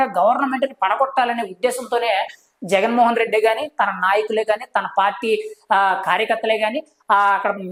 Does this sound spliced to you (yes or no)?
no